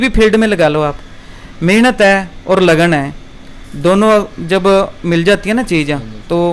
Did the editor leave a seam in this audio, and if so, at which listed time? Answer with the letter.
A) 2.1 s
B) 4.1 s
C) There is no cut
C